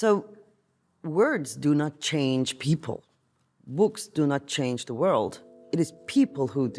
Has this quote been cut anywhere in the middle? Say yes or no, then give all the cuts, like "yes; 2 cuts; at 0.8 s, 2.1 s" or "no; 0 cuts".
no; 0 cuts